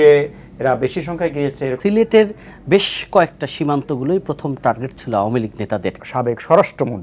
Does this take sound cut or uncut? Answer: cut